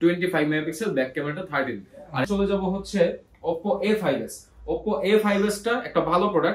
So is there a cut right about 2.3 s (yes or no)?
yes